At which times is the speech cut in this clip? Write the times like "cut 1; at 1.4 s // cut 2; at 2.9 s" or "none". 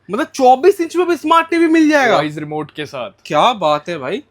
none

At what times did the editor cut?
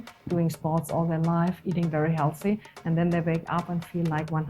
none

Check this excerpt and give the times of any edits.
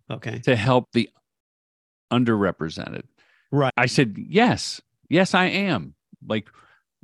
cut 1; at 3.9 s

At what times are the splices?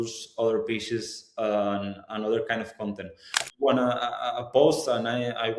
cut 1; at 3.4 s

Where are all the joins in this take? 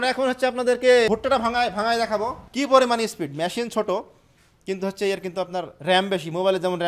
cut 1; at 1.1 s // cut 2; at 2.4 s

